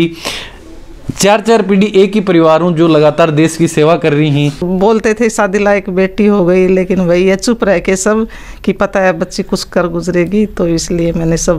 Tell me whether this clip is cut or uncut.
cut